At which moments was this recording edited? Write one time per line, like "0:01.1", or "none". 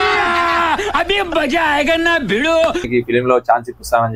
0:02.8